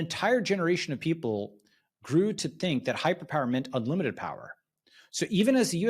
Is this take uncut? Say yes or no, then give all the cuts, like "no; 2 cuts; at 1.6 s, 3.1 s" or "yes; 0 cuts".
yes; 0 cuts